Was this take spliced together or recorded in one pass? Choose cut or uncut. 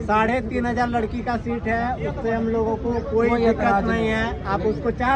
uncut